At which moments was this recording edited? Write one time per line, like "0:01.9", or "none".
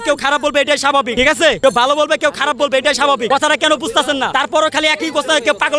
0:01.4
0:03.2
0:04.3